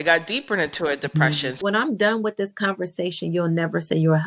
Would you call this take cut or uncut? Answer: cut